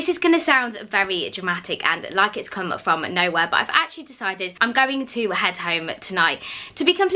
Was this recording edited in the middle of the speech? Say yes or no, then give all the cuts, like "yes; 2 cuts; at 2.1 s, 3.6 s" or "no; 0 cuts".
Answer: no; 0 cuts